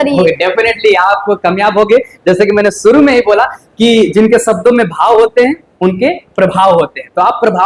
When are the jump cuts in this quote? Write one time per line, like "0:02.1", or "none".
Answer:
none